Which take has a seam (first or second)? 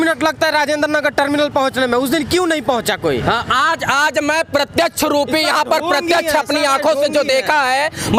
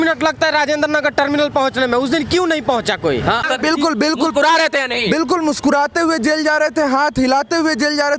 second